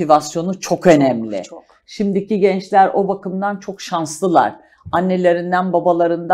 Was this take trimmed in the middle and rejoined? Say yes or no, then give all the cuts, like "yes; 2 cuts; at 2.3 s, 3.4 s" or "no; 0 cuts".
no; 0 cuts